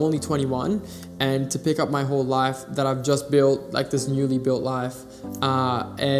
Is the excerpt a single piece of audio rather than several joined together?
yes; 0 cuts

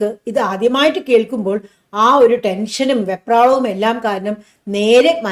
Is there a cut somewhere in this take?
no; 0 cuts

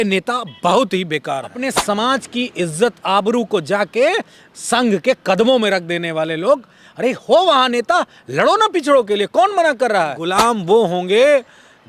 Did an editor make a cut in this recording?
yes; 2 cuts; at 1.7 s, 10.2 s

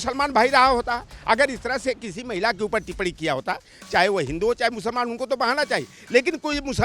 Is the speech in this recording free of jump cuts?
yes; 0 cuts

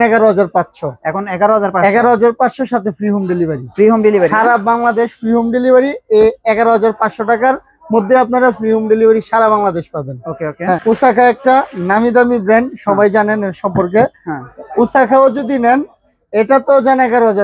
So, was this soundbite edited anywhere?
yes; 1 cut; at 10.8 s

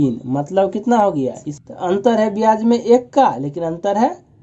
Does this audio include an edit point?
yes; 1 cut; at 1.5 s

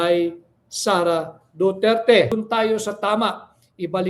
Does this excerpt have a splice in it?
yes; 1 cut; at 2.3 s

